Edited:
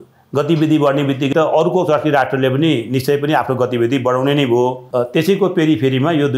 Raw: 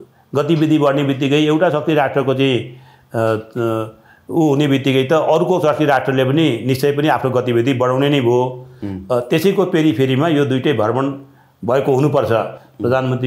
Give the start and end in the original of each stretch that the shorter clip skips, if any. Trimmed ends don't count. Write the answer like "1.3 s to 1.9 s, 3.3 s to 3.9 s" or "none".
1.3 s to 5.1 s, 8.6 s to 9.0 s